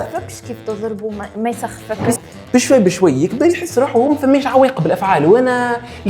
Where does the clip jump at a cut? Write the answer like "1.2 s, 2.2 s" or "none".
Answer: 2.1 s